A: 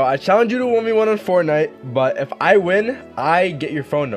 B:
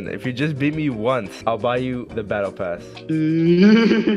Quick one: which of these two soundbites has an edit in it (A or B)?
B